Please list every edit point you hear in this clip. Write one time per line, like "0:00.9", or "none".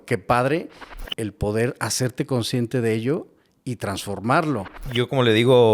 0:04.8